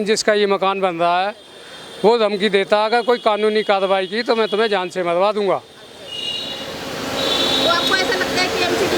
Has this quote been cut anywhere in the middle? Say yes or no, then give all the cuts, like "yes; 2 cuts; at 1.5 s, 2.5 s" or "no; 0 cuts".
no; 0 cuts